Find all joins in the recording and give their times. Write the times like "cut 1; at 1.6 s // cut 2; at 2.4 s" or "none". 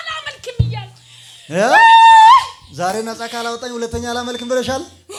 none